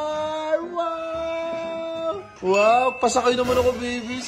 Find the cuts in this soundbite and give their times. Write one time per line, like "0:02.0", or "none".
0:02.3